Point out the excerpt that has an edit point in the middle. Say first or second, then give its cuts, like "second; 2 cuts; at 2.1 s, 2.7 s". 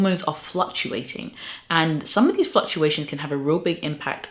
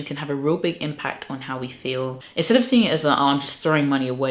second; 1 cut; at 2.2 s